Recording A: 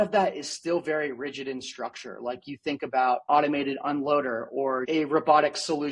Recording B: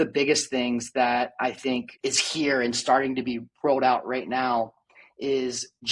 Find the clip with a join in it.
A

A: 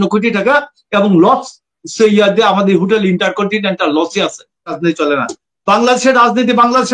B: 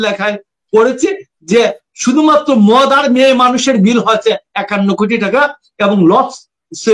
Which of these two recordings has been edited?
A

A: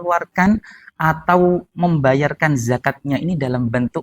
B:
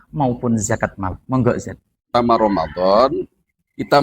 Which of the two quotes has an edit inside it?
B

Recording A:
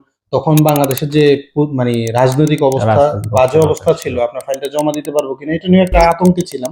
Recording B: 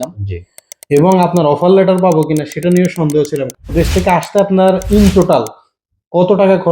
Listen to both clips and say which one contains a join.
B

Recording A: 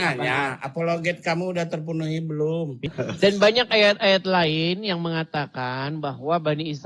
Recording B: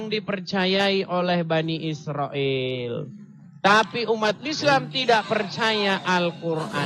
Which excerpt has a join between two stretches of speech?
A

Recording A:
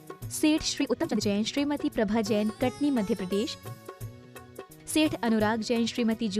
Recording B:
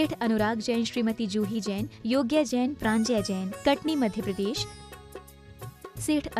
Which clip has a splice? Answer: A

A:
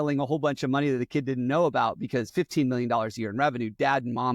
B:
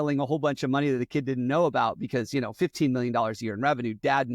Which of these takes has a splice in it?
A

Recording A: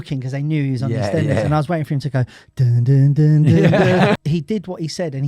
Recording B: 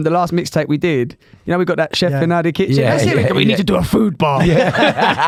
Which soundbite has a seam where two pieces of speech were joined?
A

